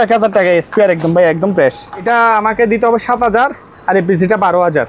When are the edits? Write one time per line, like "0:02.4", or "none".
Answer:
0:02.0